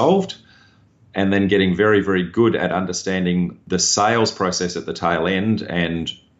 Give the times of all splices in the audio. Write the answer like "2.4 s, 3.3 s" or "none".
3.6 s